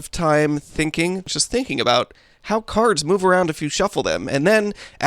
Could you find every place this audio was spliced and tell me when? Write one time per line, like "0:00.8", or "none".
0:01.3

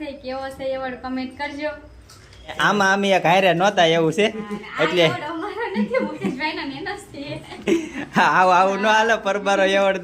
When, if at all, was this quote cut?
0:02.6

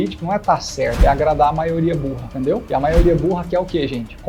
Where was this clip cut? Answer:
none

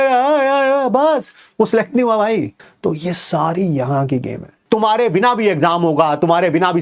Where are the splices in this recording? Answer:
0:02.6
0:04.6

